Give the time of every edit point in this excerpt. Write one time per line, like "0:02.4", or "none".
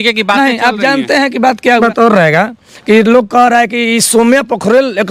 0:01.8

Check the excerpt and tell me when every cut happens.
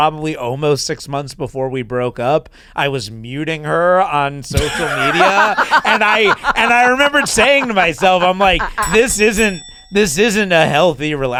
none

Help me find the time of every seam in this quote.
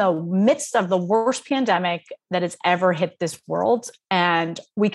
none

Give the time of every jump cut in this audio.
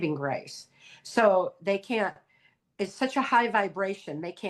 none

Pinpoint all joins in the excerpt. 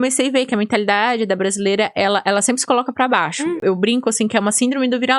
0:03.6

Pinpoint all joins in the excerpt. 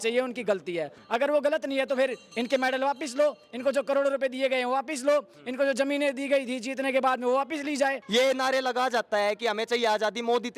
0:01.0
0:08.0

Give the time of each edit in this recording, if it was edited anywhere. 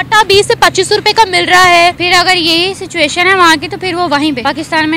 0:02.0

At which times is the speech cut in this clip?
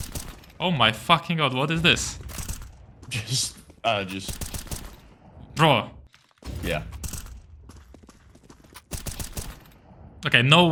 none

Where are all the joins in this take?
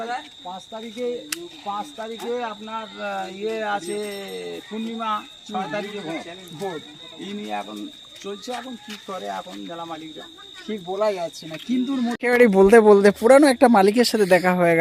0:12.1

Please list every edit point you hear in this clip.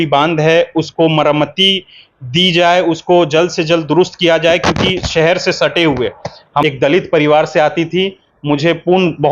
0:06.6

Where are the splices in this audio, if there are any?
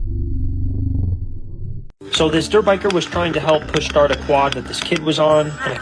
0:02.0

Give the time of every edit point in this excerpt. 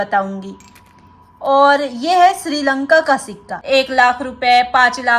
0:03.6

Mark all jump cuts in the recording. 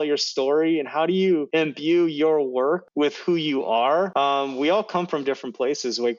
0:01.5
0:02.9
0:04.1

